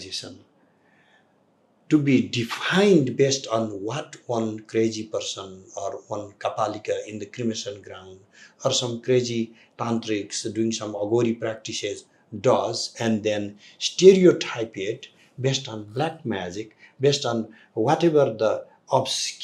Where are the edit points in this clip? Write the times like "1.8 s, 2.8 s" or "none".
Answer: none